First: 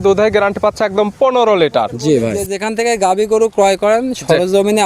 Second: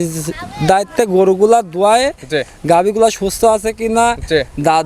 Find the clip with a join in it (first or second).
first